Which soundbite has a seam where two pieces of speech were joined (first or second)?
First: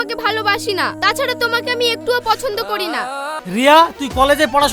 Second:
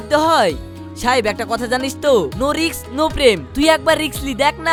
first